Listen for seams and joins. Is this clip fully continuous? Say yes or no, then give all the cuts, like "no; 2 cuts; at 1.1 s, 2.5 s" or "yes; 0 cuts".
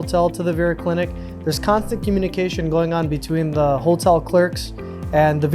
yes; 0 cuts